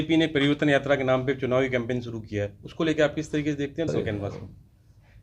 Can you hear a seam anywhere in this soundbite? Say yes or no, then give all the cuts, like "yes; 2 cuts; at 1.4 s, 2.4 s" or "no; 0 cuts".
yes; 1 cut; at 3.9 s